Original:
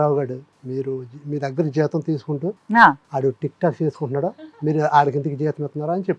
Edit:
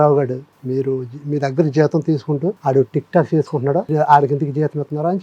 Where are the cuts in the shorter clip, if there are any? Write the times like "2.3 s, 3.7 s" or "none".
2.6 s, 3.9 s